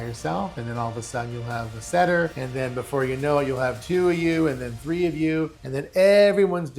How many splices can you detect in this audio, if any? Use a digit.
2